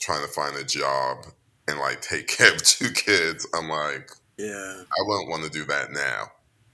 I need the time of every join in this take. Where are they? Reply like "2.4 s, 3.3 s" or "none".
none